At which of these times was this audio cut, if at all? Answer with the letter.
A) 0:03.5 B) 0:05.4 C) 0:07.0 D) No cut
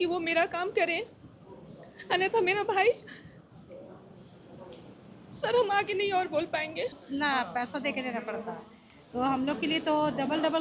C